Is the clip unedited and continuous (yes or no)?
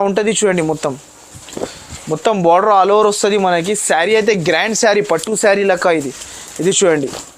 yes